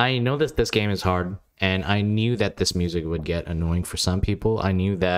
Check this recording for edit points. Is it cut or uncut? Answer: uncut